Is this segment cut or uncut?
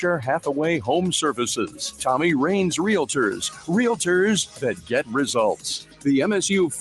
cut